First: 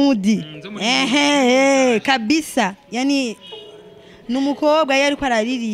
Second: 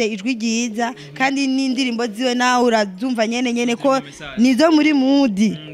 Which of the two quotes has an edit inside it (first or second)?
first